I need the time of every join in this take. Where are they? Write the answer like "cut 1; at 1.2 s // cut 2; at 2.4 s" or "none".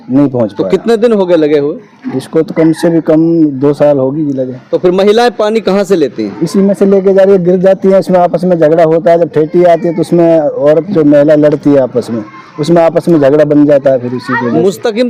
none